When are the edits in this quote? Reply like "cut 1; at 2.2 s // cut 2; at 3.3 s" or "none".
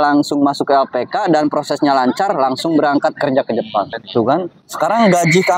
cut 1; at 3.9 s